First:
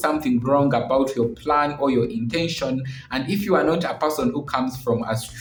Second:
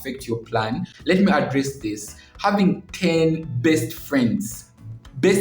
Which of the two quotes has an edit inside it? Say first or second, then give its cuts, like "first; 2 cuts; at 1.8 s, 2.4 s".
second; 1 cut; at 0.9 s